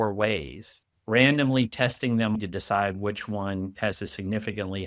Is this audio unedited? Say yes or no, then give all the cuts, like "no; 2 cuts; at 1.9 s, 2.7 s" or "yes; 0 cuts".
no; 2 cuts; at 2.4 s, 3.7 s